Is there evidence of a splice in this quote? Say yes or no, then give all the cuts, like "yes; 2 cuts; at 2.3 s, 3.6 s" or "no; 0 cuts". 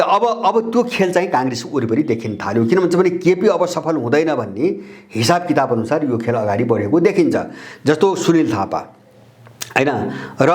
no; 0 cuts